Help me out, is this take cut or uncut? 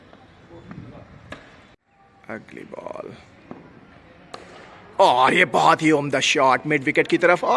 cut